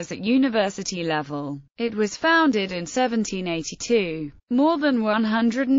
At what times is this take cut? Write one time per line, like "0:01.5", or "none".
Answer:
0:03.4